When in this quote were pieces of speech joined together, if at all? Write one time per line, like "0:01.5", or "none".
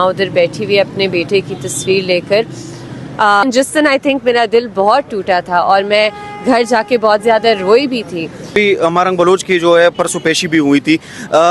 0:03.4
0:08.5